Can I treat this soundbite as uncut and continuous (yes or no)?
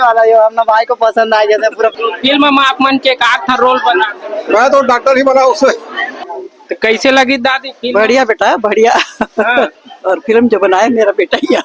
no